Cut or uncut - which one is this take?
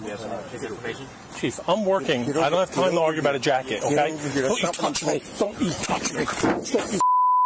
cut